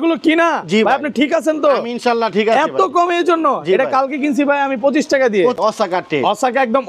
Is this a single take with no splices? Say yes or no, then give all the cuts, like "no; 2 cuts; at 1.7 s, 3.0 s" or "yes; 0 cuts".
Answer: no; 1 cut; at 5.6 s